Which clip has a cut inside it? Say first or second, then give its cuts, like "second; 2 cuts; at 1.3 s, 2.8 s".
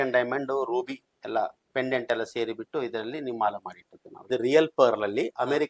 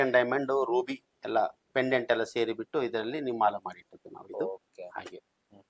first; 1 cut; at 4.3 s